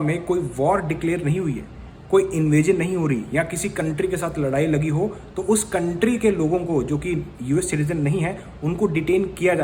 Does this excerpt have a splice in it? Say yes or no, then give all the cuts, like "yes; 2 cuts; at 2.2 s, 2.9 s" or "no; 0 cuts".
no; 0 cuts